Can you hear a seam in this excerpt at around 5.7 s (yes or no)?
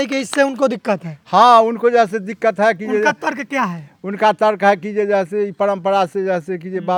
no